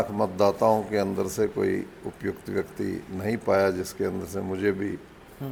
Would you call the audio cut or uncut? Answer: uncut